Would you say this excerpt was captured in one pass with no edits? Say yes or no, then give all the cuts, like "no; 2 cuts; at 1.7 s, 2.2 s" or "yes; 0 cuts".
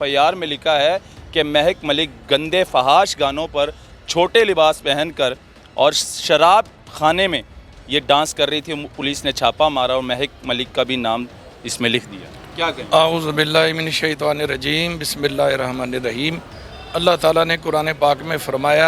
yes; 0 cuts